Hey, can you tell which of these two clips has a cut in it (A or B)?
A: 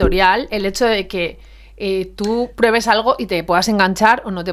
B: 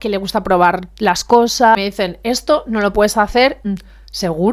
B